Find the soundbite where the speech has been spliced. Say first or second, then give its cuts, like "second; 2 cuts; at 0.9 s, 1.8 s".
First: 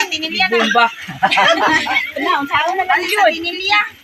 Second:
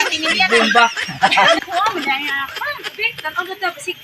second; 1 cut; at 1.6 s